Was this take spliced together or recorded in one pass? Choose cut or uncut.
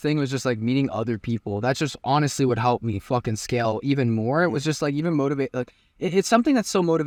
uncut